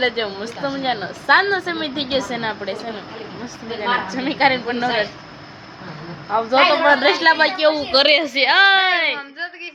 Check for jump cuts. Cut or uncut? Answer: uncut